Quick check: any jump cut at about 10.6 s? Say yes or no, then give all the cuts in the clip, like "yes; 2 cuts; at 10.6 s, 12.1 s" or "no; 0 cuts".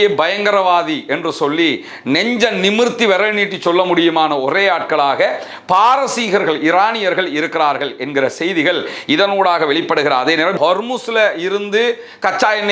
yes; 1 cut; at 10.6 s